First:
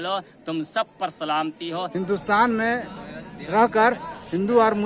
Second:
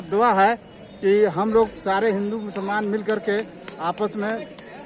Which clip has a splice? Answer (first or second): first